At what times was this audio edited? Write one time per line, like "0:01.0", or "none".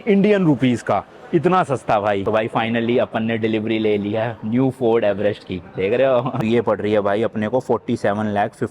0:02.2
0:06.4